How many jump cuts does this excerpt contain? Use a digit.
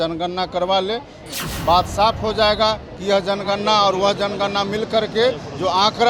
0